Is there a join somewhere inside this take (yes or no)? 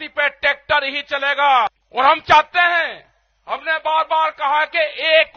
yes